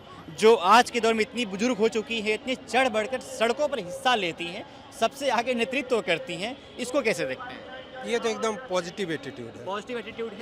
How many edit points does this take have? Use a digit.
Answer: 0